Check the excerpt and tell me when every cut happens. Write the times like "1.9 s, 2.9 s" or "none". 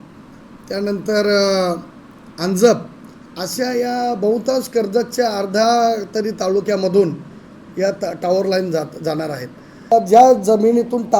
9.9 s

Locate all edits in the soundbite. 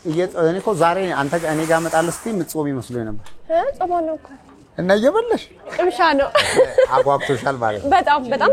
5.7 s

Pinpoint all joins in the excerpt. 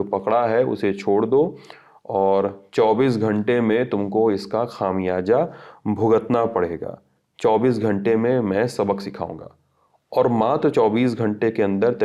none

